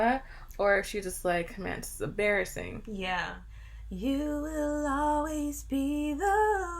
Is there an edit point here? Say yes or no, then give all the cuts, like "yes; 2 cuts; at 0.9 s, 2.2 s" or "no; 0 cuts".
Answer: yes; 1 cut; at 3.3 s